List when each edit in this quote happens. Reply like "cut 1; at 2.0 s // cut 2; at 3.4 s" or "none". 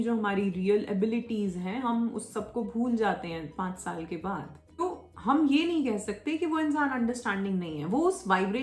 cut 1; at 4.8 s